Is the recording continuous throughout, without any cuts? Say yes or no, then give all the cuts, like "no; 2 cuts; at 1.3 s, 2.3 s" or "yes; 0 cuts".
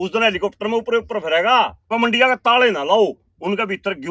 no; 1 cut; at 1.9 s